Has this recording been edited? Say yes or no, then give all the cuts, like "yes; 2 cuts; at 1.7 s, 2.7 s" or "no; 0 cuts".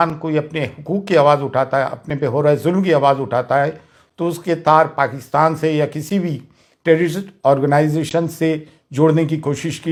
no; 0 cuts